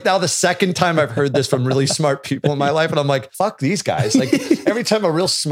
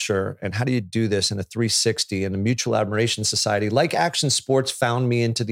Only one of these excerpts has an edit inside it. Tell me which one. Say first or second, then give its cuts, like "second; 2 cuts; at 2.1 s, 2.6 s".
first; 1 cut; at 3.3 s